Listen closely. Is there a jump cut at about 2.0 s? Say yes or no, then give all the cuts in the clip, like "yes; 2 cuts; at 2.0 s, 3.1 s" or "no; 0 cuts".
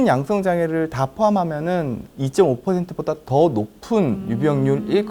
yes; 1 cut; at 2.0 s